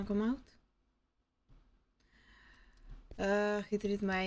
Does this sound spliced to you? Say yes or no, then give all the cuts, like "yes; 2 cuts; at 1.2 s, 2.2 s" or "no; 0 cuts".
no; 0 cuts